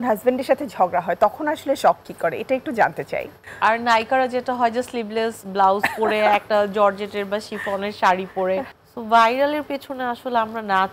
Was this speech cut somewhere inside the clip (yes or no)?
yes